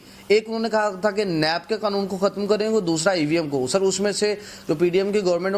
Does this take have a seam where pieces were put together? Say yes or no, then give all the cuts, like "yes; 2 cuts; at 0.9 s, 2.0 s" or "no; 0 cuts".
no; 0 cuts